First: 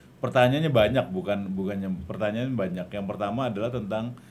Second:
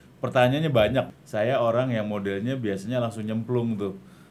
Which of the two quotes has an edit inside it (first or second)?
second